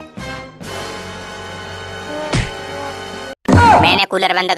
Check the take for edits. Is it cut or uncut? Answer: uncut